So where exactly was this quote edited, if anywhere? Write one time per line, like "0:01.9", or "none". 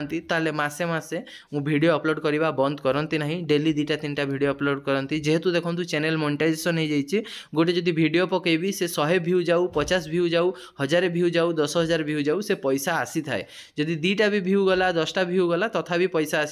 none